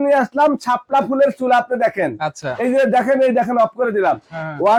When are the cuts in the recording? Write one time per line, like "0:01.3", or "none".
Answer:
none

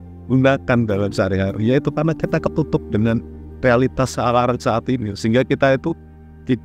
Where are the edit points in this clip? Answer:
none

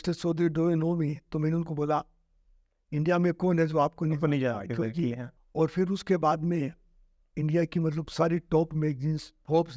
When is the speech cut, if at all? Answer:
0:05.3

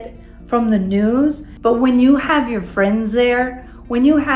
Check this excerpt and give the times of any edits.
0:01.5

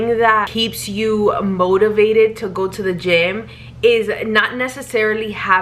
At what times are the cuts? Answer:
none

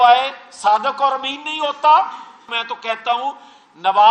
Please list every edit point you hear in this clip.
0:02.5

